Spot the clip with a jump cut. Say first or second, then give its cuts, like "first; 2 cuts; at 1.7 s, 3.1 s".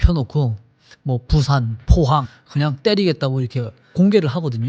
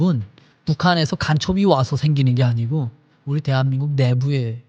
first; 2 cuts; at 2.3 s, 3.9 s